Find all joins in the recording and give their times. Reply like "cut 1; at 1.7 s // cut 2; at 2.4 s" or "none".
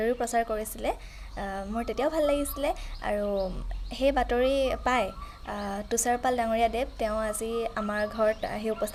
none

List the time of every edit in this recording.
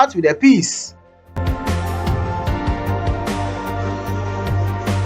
cut 1; at 1.3 s

